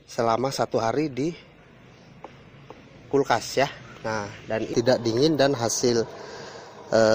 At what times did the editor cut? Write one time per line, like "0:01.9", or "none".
0:04.6

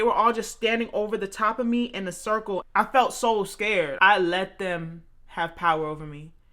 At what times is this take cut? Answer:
0:02.7
0:03.9

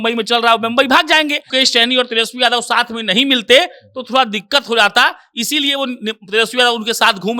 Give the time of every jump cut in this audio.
0:01.5

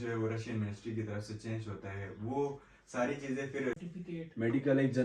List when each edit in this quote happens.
0:03.7

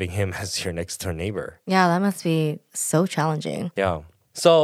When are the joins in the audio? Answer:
0:01.6
0:02.7
0:03.8

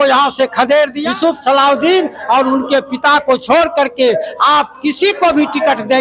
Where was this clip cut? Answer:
0:01.0

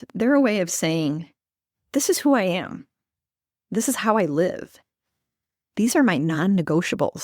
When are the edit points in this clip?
none

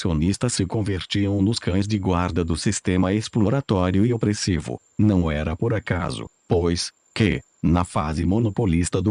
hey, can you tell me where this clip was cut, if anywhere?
none

